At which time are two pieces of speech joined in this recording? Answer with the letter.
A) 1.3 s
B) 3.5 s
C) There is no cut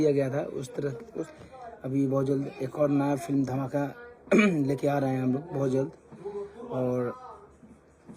A